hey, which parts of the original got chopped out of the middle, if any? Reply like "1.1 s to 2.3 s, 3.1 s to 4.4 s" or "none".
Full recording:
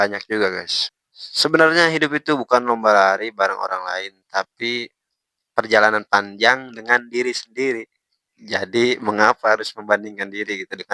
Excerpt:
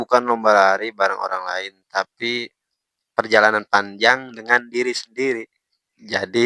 none